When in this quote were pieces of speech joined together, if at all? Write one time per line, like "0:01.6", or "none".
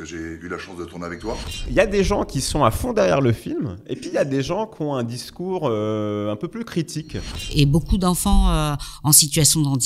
0:01.7
0:07.5